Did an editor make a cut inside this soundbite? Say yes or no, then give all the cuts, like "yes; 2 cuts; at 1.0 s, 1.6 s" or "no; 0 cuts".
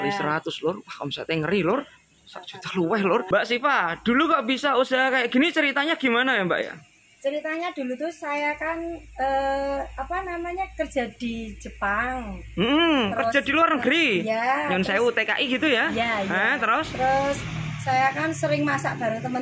yes; 1 cut; at 3.3 s